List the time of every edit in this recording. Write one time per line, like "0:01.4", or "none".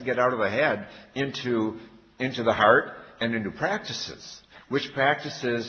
0:02.9